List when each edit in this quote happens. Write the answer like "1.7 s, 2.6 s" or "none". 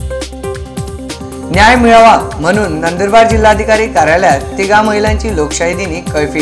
1.1 s